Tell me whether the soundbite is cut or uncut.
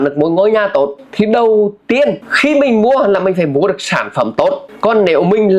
cut